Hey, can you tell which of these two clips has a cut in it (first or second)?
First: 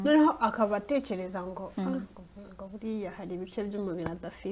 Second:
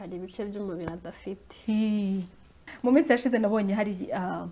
second